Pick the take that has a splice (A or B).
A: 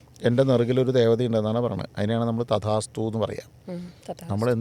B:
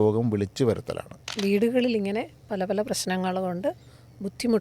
B